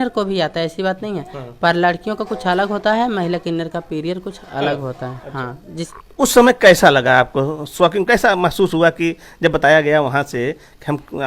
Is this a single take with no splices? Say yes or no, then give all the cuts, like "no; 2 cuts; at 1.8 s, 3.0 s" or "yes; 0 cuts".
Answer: no; 1 cut; at 5.9 s